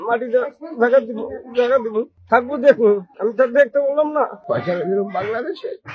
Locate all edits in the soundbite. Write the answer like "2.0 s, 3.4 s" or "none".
2.2 s, 3.2 s, 4.4 s